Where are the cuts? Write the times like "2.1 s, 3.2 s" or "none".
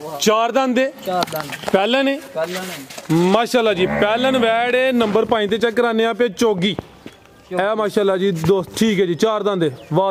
none